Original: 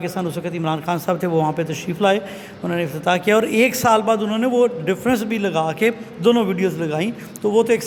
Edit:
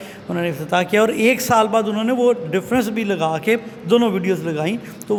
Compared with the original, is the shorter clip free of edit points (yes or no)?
yes